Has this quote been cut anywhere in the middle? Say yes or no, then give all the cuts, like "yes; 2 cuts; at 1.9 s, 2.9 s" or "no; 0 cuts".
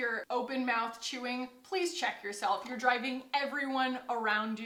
no; 0 cuts